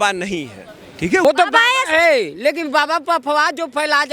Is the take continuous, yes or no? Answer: no